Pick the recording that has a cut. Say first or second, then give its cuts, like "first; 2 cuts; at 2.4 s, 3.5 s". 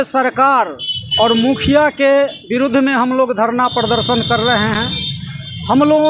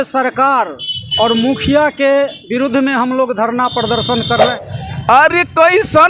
second; 1 cut; at 4.5 s